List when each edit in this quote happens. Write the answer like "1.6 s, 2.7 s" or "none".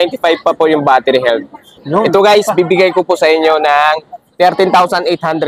none